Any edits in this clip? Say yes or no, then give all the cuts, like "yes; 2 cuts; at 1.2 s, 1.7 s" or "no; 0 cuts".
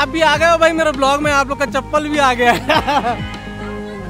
yes; 1 cut; at 3.2 s